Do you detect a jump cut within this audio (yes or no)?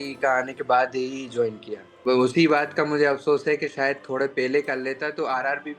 yes